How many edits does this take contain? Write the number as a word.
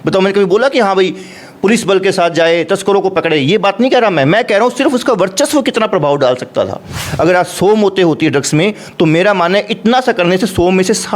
one